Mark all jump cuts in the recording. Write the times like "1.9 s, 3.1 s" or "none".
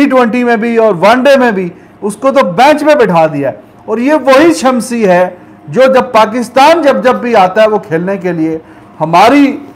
none

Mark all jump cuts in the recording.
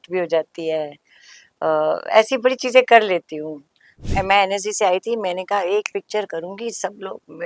4.1 s

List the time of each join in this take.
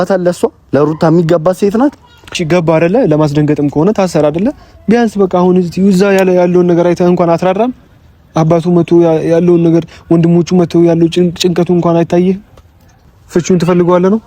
2.4 s, 12.9 s

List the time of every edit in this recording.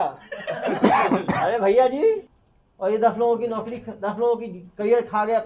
2.3 s

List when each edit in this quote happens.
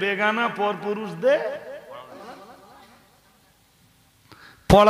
2.2 s

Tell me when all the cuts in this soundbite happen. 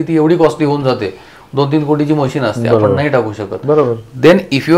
none

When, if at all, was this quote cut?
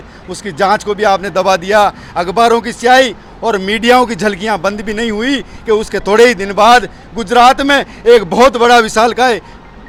none

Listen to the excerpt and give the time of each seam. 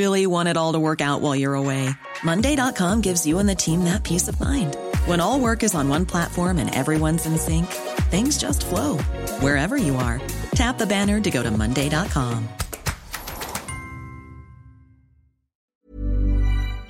15.7 s

